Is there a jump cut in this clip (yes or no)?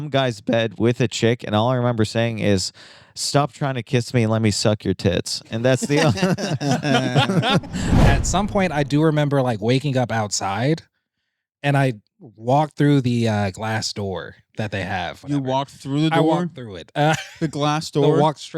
yes